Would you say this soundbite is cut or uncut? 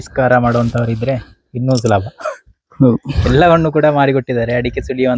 uncut